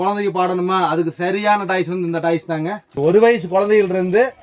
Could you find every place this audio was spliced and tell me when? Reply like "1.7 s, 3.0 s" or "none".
2.9 s